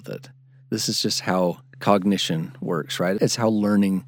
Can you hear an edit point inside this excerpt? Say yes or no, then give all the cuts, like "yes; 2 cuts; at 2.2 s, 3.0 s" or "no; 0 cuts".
yes; 1 cut; at 3.2 s